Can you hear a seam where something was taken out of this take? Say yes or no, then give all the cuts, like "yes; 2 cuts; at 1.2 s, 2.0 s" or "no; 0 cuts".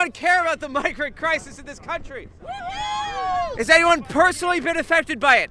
yes; 1 cut; at 3.5 s